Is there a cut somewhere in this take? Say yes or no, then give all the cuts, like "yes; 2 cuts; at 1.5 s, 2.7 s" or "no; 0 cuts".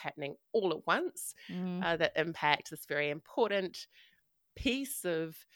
no; 0 cuts